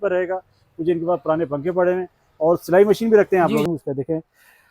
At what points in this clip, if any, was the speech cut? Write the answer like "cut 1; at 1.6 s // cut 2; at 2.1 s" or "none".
cut 1; at 3.7 s

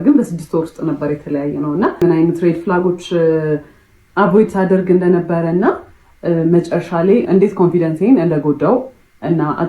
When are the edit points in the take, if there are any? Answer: cut 1; at 2.0 s

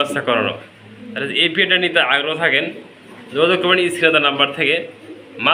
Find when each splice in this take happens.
none

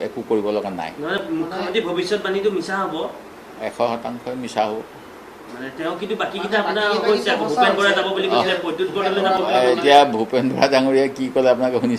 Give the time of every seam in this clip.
none

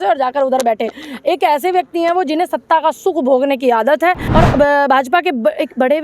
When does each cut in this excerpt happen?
cut 1; at 4.2 s

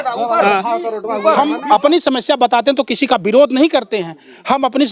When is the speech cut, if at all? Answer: cut 1; at 1.3 s

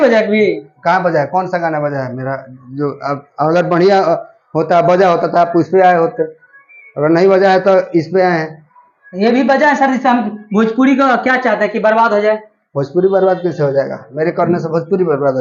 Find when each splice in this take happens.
none

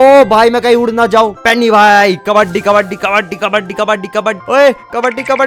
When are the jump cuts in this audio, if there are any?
cut 1; at 1.4 s // cut 2; at 4.4 s

